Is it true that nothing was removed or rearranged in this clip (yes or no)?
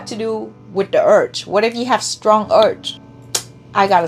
no